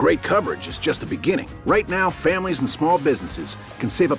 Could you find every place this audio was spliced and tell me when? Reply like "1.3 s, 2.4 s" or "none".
none